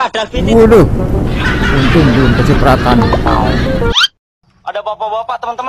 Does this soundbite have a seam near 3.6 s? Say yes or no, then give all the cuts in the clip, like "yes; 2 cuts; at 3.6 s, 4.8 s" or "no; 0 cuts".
yes; 1 cut; at 3.6 s